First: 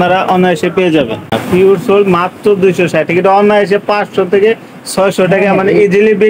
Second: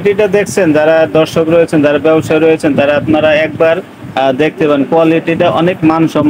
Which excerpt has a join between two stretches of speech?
first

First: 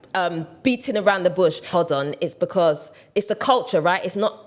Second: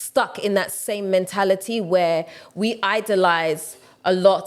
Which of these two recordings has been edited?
first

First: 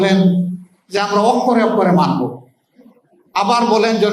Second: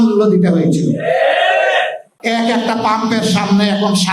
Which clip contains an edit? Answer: second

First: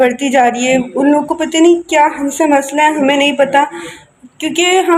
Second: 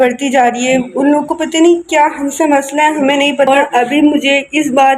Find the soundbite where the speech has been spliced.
second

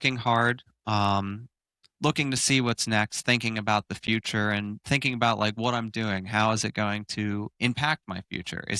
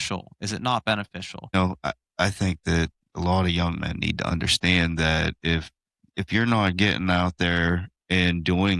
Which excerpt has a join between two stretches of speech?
second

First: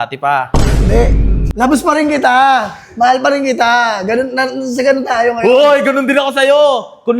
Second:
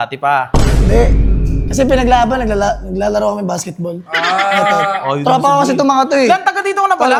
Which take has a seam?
first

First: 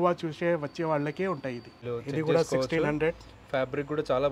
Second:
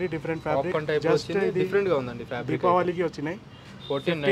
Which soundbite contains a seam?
first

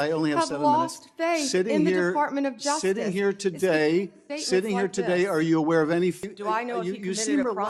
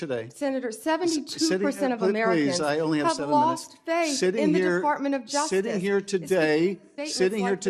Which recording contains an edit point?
first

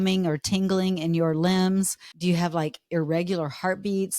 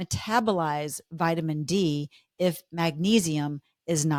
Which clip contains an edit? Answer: first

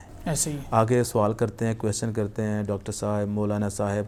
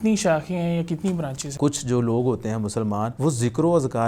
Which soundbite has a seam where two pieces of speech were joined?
second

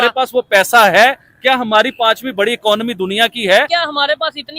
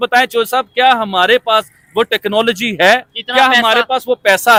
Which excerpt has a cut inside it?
first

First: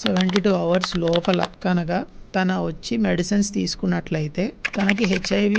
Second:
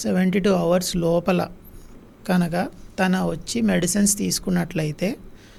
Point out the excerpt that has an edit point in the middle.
first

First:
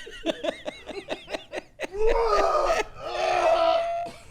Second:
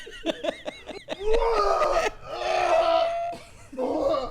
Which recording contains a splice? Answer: second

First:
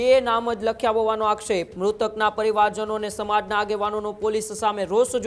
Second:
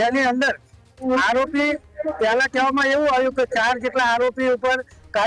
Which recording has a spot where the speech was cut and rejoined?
first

